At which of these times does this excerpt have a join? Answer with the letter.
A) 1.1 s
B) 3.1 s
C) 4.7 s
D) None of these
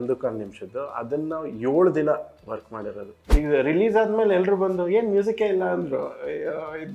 B